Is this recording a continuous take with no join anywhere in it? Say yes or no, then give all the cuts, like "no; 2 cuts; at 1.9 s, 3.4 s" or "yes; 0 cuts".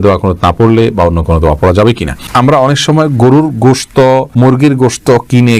no; 1 cut; at 2.3 s